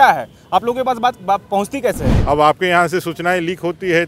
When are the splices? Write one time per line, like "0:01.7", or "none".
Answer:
0:02.1

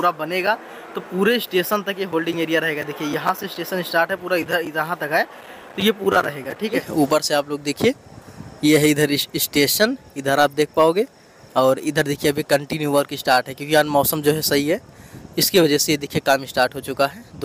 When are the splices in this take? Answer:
0:06.8

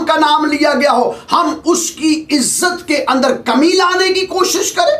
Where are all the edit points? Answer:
none

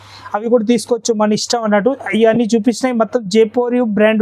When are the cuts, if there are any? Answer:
none

